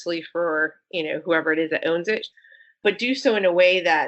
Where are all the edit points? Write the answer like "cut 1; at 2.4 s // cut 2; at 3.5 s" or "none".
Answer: cut 1; at 2.3 s

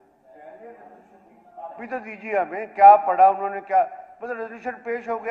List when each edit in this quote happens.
none

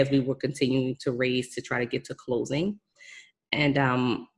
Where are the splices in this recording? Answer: none

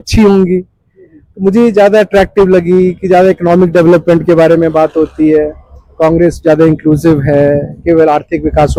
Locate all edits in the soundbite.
none

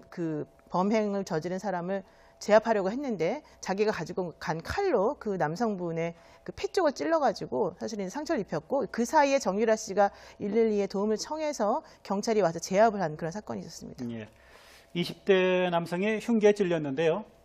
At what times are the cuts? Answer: cut 1; at 11.8 s

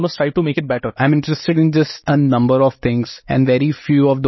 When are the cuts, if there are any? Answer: cut 1; at 0.9 s // cut 2; at 2.0 s // cut 3; at 3.2 s

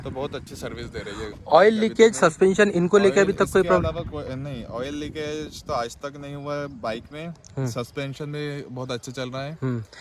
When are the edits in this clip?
none

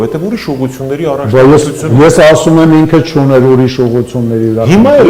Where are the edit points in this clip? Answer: none

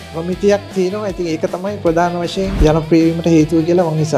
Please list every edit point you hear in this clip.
cut 1; at 2.6 s

